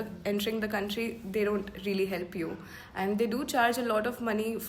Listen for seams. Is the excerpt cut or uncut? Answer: uncut